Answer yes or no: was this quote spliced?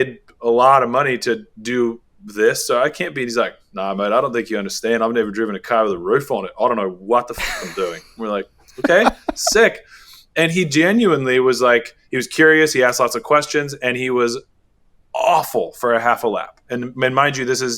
no